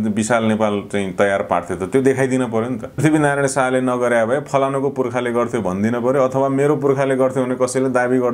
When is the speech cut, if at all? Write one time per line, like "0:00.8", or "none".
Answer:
0:03.0